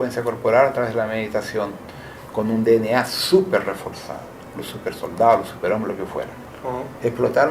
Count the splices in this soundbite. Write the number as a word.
one